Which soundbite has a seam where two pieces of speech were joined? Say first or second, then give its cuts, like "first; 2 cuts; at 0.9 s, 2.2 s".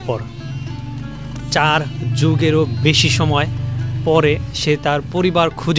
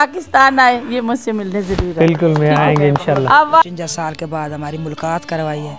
second; 1 cut; at 3.6 s